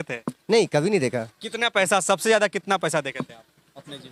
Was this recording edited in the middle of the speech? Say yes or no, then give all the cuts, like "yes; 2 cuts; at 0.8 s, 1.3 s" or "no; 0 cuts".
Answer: no; 0 cuts